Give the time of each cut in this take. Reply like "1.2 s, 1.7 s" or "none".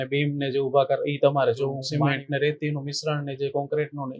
1.8 s